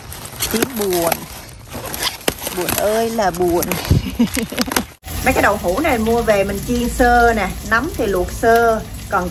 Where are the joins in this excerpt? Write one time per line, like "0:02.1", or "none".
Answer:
0:05.0